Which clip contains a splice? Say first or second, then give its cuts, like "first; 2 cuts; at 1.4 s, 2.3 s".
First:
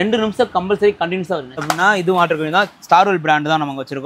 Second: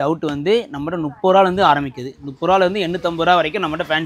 first; 1 cut; at 1.6 s